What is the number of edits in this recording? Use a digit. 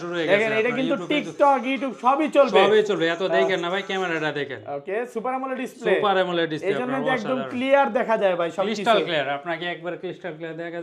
0